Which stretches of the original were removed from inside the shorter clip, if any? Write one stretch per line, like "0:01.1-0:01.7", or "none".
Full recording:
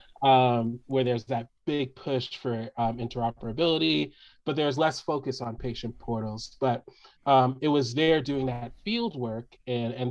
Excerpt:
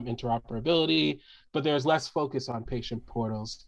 none